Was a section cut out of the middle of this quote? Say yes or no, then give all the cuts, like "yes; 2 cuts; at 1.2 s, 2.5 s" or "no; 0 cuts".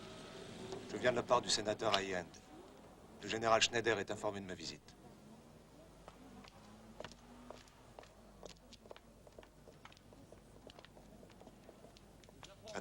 yes; 1 cut; at 11.3 s